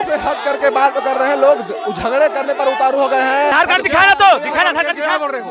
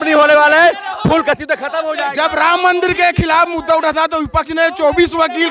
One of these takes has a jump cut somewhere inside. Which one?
first; 1 cut; at 3.5 s

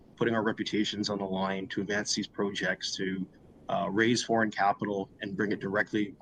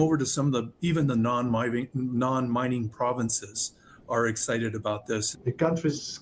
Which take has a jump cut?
second; 1 cut; at 5.3 s

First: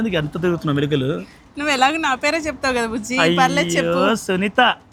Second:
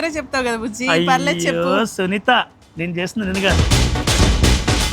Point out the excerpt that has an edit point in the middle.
second; 1 cut; at 3.5 s

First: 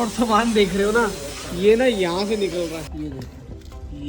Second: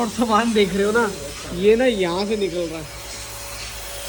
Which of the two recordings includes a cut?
first; 1 cut; at 2.9 s

